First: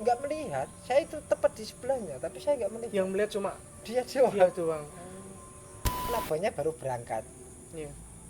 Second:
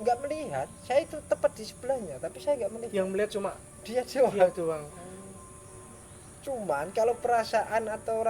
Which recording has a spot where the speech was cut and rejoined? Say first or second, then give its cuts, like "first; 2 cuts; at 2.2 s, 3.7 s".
first; 1 cut; at 6.1 s